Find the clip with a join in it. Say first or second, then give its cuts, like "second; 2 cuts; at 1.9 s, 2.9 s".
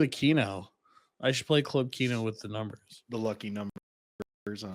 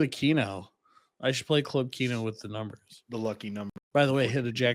second; 1 cut; at 3.8 s